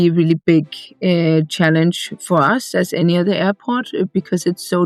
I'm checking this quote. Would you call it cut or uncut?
uncut